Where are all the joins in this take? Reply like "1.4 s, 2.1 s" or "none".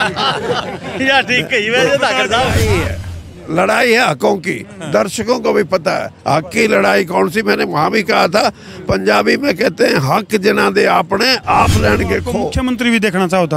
2.7 s, 12.5 s